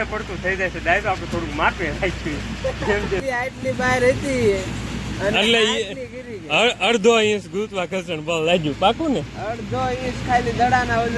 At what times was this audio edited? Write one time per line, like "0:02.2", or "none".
0:03.2